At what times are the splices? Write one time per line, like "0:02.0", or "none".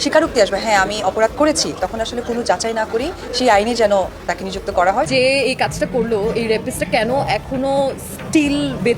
0:05.1